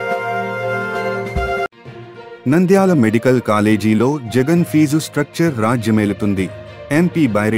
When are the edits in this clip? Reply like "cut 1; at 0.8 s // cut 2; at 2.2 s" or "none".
cut 1; at 1.7 s